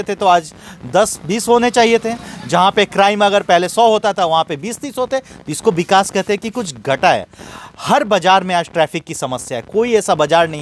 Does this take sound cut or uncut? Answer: uncut